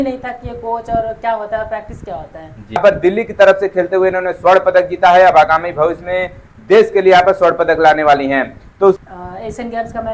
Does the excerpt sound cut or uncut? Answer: cut